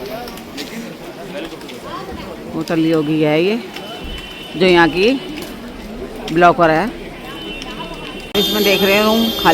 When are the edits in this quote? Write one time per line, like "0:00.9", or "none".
0:08.2